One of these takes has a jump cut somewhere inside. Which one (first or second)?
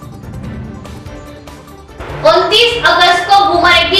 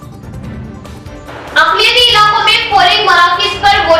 first